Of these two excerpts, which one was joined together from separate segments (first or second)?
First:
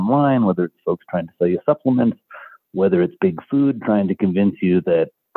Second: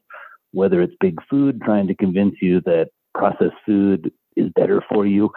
second